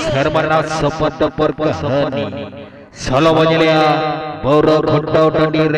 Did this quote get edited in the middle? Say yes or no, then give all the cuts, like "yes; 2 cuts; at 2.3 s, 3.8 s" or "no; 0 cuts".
no; 0 cuts